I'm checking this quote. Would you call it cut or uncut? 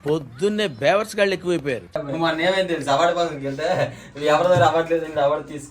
cut